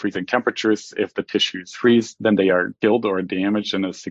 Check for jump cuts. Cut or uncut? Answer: uncut